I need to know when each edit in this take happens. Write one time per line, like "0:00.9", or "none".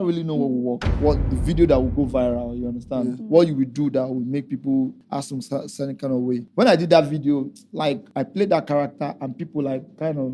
0:00.9
0:05.0
0:06.5
0:08.1